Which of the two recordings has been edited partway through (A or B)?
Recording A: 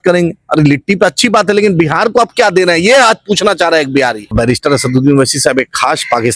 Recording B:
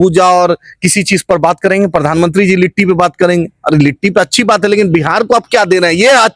A